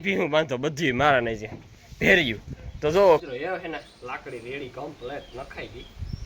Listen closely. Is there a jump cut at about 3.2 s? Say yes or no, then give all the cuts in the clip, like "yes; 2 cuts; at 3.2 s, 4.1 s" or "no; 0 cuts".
yes; 1 cut; at 3.2 s